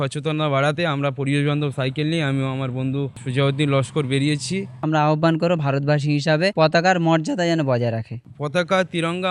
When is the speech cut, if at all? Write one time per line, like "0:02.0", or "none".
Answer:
0:03.2
0:04.8
0:06.5
0:08.1